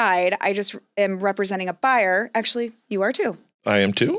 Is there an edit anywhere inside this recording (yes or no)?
no